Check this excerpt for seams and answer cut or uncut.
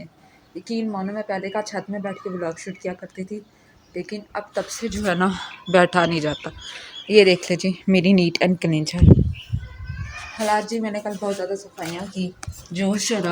uncut